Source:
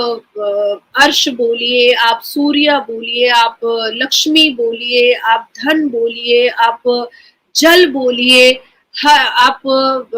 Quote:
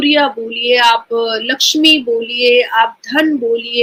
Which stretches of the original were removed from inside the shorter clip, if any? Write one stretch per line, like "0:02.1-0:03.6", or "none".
none